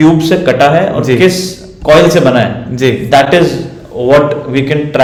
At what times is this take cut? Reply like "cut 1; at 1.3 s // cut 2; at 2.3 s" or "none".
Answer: none